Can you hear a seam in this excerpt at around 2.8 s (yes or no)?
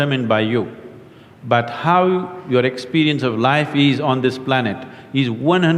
no